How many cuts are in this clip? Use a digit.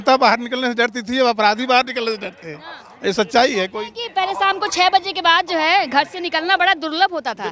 0